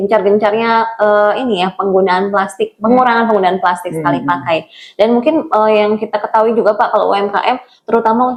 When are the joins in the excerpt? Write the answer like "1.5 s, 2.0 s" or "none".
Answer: none